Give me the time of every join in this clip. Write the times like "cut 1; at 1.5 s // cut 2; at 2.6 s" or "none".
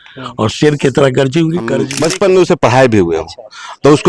cut 1; at 1.9 s

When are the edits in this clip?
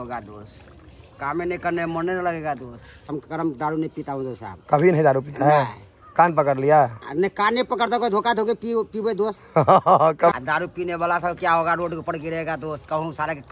cut 1; at 3.1 s // cut 2; at 10.3 s

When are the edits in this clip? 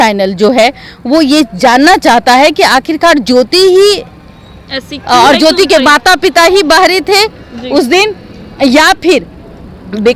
none

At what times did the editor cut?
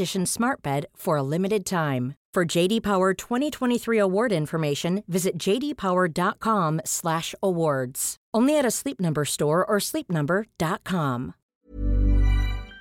cut 1; at 11.4 s

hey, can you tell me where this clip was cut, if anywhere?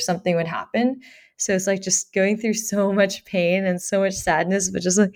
none

